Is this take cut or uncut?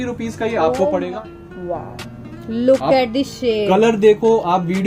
cut